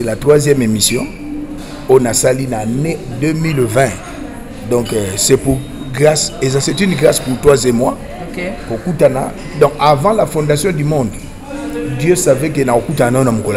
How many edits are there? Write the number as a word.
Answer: zero